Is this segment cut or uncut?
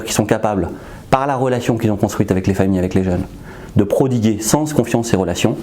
uncut